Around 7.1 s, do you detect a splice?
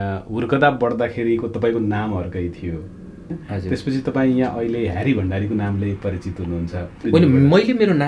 yes; 2 cuts; at 3.3 s, 7.1 s

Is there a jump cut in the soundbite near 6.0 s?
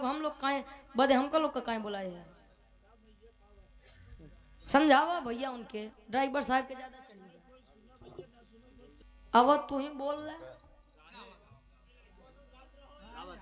no; 1 cut; at 9.0 s

